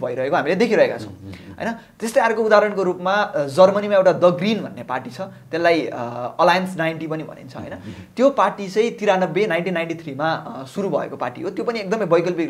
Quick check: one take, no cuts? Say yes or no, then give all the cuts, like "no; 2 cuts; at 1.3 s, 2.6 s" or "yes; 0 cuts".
yes; 0 cuts